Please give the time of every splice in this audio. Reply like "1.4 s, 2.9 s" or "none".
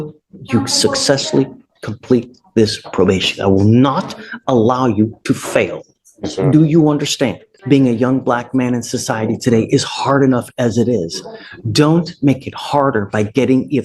7.5 s